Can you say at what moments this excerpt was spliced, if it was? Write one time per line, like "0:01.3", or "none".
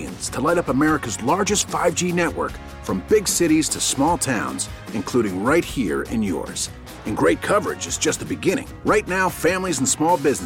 none